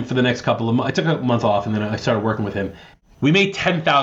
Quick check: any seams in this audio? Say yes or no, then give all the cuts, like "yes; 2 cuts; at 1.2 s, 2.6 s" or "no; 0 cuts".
yes; 1 cut; at 2.9 s